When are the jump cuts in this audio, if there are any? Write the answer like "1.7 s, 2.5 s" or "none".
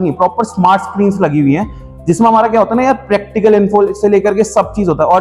none